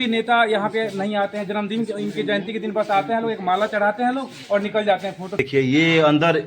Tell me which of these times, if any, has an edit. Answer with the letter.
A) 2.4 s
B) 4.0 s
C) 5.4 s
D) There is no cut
C